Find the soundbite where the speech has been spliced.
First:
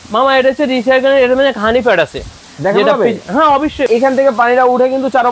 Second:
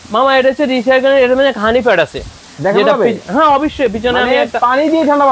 first; 1 cut; at 3.9 s

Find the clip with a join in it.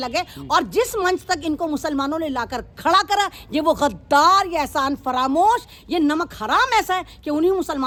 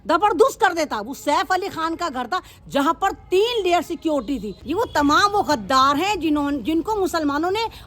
second; 1 cut; at 4.6 s

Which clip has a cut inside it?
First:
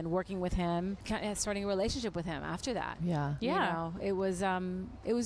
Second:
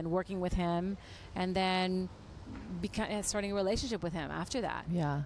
first; 1 cut; at 1.0 s

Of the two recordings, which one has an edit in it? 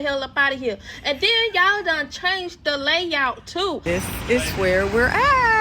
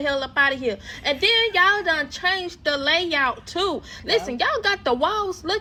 first; 1 cut; at 3.8 s

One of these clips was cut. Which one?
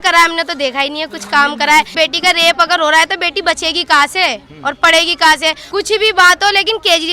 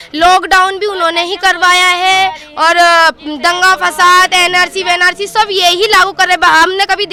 first; 2 cuts; at 1.9 s, 5.6 s

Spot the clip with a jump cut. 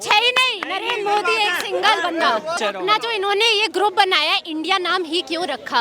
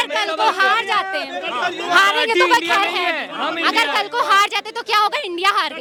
first; 1 cut; at 2.6 s

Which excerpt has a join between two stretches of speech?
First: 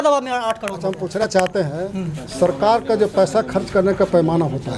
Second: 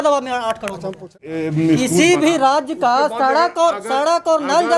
second; 1 cut; at 1.2 s

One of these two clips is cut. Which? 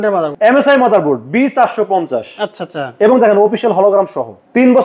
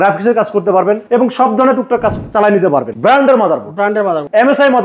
second; 2 cuts; at 1.0 s, 2.9 s

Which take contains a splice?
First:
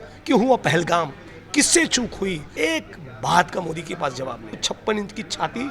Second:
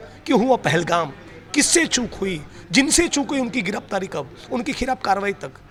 first; 2 cuts; at 2.5 s, 4.6 s

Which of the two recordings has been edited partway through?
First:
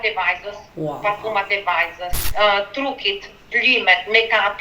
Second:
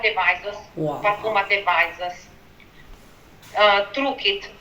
first; 1 cut; at 2.2 s

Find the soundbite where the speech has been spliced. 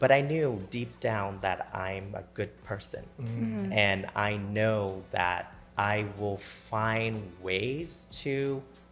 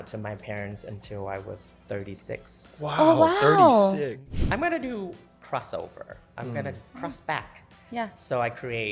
second; 1 cut; at 4.2 s

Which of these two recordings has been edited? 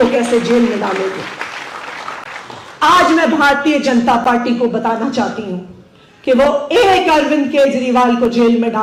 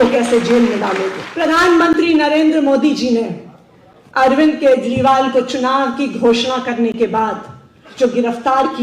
second; 1 cut; at 1.2 s

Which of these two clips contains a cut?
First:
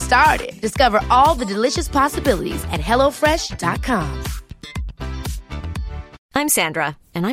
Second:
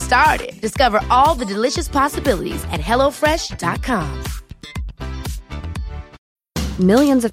first; 1 cut; at 6.1 s

